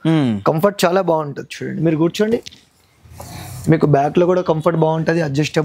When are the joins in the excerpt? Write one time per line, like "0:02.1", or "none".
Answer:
none

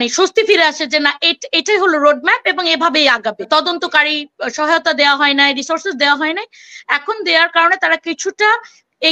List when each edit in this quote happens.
0:03.5

